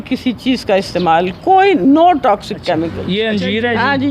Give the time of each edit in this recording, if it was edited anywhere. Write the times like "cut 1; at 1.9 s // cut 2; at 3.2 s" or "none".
cut 1; at 3.1 s

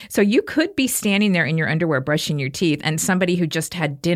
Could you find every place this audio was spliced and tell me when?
none

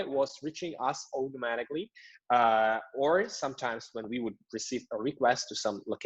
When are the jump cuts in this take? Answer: none

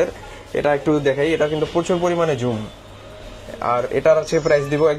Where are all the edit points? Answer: none

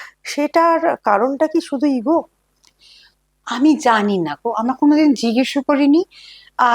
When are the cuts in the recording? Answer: none

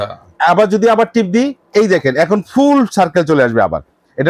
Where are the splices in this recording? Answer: none

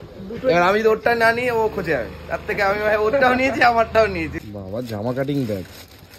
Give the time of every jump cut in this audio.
cut 1; at 4.3 s

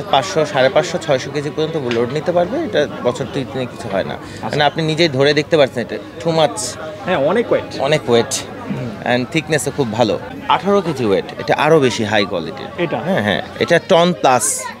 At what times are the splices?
cut 1; at 10.2 s

